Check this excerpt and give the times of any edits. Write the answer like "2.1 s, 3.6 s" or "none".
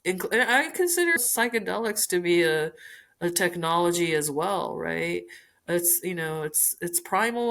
1.2 s